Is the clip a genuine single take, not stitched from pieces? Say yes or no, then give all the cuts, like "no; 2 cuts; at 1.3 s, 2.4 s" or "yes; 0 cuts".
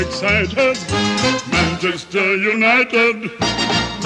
yes; 0 cuts